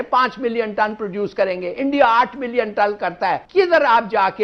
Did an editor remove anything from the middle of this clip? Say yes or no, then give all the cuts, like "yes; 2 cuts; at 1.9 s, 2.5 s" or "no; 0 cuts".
yes; 1 cut; at 3.4 s